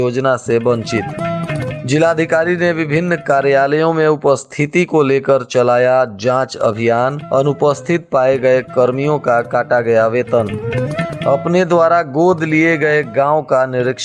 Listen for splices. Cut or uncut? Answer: uncut